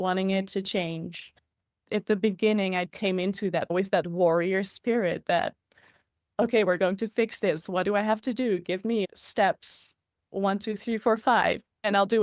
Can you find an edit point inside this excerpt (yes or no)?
yes